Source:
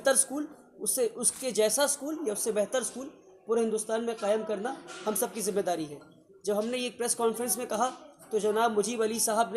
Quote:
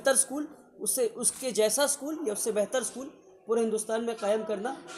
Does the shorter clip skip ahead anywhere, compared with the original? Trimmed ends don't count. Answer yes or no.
no